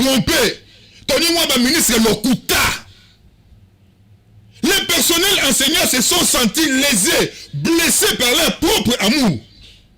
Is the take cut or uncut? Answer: uncut